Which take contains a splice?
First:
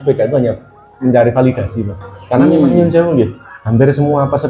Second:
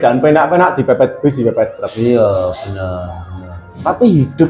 first; 1 cut; at 2.7 s

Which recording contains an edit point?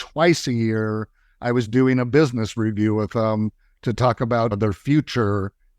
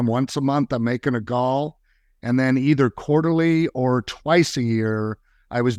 first; 1 cut; at 4.5 s

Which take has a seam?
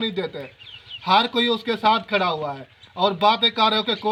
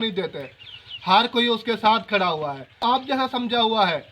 second; 1 cut; at 2.8 s

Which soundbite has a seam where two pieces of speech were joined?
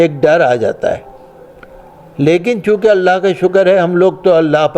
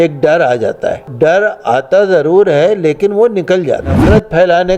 second; 2 cuts; at 1.1 s, 4.0 s

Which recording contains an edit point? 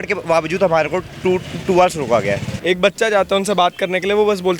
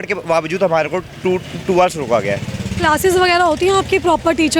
first; 1 cut; at 2.5 s

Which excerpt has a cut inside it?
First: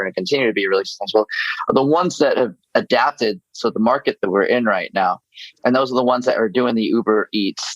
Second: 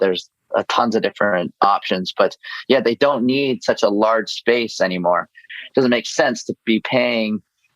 second; 1 cut; at 5.4 s

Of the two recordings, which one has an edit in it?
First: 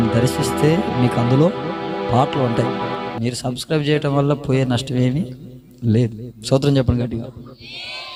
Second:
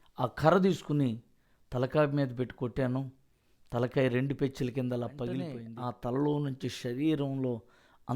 second; 1 cut; at 5.6 s

